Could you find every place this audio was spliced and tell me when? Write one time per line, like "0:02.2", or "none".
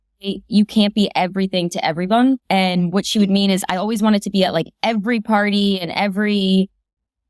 0:02.4